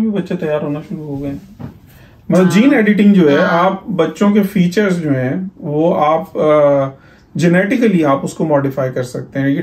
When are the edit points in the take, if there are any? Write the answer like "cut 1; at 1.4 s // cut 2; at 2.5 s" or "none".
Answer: none

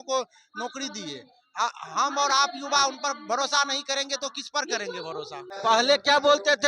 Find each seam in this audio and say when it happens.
cut 1; at 5.5 s

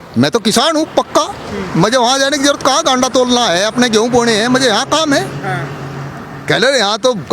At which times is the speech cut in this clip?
none

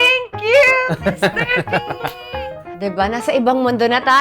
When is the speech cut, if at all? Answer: cut 1; at 2.7 s

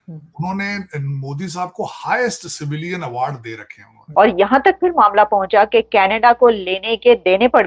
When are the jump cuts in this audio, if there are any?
cut 1; at 4.0 s

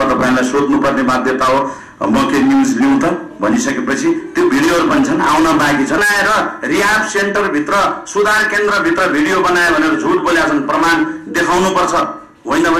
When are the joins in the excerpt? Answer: cut 1; at 6.0 s

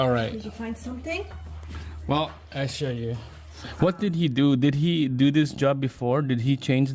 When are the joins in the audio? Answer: cut 1; at 3.6 s

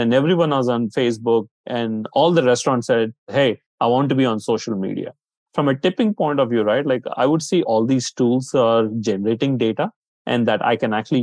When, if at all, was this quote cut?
cut 1; at 1.6 s // cut 2; at 3.3 s // cut 3; at 5.4 s // cut 4; at 7.7 s

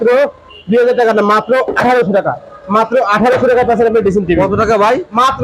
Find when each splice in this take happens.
none

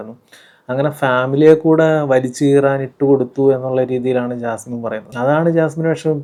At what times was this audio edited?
none

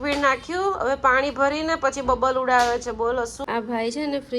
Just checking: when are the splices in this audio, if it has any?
cut 1; at 3.4 s

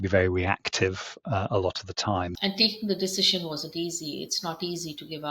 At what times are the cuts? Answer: cut 1; at 2.3 s

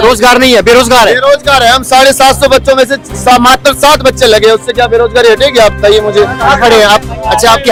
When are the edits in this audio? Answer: none

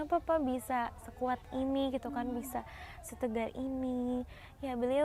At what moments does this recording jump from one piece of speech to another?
none

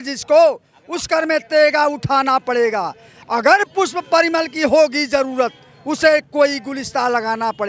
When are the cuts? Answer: none

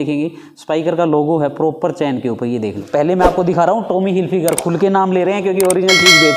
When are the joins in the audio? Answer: cut 1; at 2.8 s

